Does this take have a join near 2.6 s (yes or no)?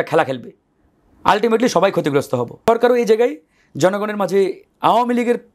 yes